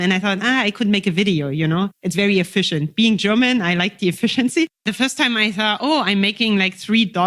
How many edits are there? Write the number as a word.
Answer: one